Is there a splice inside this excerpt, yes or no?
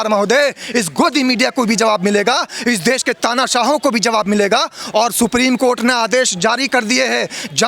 no